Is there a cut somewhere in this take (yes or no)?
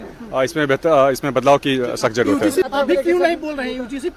yes